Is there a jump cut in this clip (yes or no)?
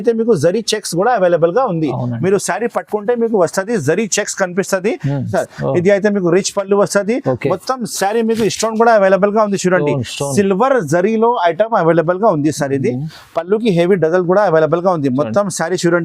yes